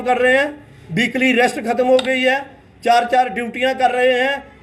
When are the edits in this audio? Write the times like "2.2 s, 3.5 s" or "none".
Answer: none